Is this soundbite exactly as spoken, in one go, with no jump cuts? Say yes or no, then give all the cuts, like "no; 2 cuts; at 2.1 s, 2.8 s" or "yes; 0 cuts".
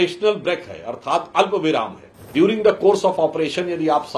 no; 1 cut; at 2.3 s